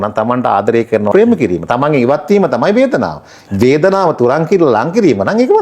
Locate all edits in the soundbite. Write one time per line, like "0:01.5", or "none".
0:01.1